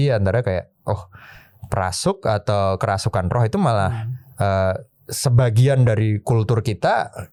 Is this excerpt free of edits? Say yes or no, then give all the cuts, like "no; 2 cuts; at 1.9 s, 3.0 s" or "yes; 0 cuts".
yes; 0 cuts